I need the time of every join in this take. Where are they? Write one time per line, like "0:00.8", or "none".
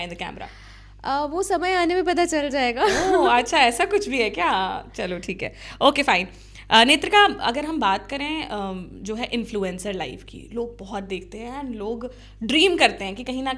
none